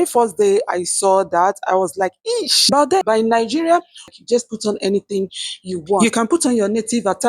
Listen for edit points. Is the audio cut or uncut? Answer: cut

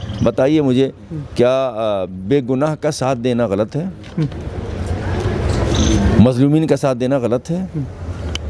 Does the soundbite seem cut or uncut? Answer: uncut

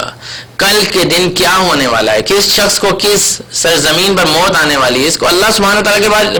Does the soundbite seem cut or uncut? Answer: uncut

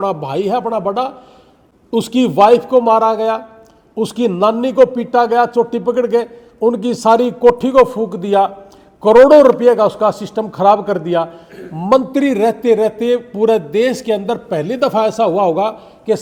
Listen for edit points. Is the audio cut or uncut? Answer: uncut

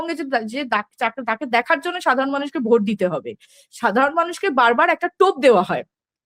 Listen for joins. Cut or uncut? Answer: uncut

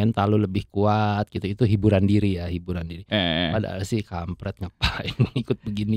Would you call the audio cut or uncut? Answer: uncut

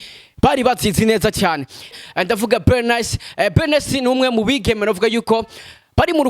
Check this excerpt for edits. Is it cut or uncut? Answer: cut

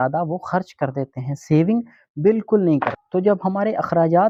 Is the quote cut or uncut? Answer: uncut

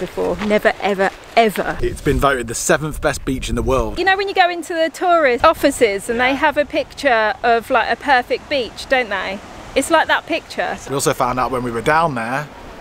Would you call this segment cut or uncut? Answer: cut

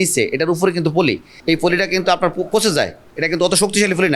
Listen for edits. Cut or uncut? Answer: cut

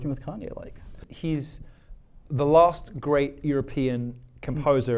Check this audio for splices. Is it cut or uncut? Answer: cut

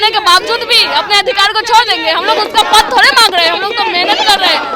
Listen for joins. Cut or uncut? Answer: uncut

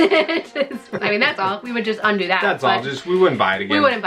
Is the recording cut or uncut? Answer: cut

